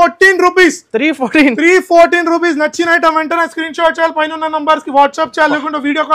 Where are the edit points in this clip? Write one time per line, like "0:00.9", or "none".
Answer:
none

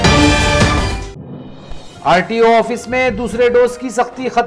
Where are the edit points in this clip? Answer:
0:01.0

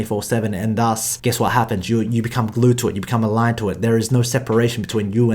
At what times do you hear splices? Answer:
0:01.1

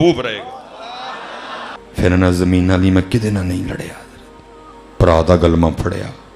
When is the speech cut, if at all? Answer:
0:01.8

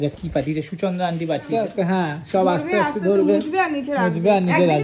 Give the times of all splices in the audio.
0:01.5

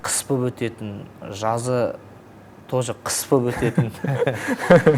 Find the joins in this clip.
none

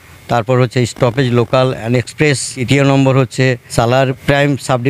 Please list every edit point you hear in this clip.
0:02.5
0:04.1

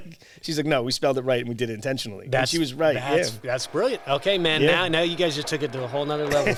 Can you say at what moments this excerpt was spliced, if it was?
none

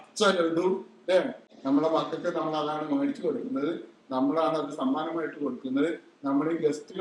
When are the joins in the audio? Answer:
0:01.5

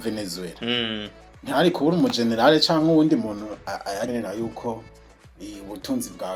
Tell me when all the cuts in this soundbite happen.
0:04.1

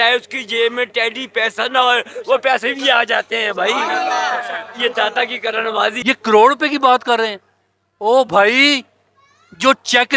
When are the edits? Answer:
0:06.0

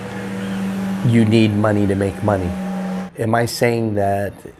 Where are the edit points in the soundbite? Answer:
0:03.0

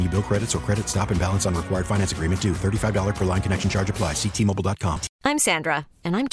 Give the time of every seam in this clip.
0:05.0

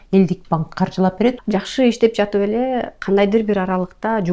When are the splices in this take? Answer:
0:01.4

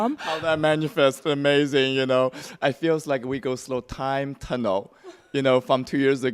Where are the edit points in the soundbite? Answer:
0:03.3

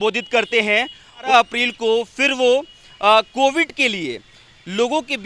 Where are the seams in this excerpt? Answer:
0:01.3

